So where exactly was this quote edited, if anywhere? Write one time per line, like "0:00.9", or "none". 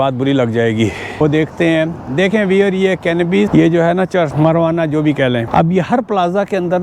0:01.2
0:03.5
0:04.3
0:05.5